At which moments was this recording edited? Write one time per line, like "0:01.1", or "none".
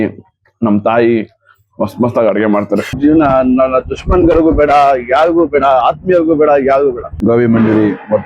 0:02.9
0:07.1

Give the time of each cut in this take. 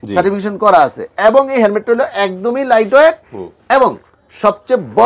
none

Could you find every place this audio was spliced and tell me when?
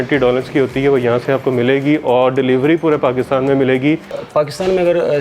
0:04.2

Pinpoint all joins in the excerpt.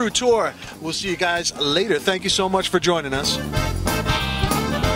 0:03.3

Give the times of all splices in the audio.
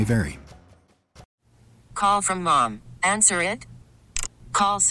0:01.3

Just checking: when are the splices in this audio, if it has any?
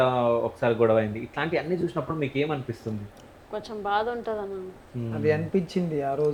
none

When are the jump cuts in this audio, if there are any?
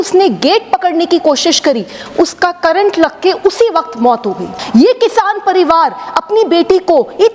0:04.5

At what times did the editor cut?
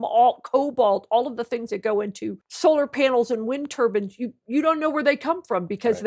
0:02.4

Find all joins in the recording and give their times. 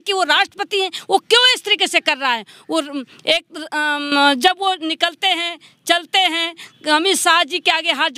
none

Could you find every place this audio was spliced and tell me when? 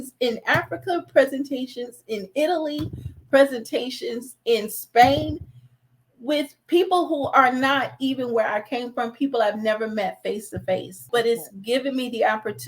0:11.0

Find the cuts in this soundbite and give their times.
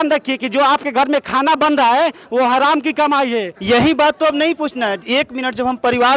0:03.5

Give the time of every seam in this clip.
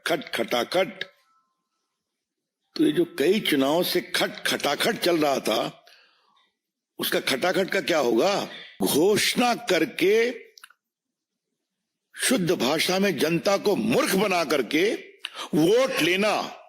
0:08.8

